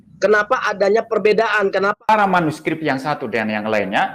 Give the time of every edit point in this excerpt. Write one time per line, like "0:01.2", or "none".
0:02.1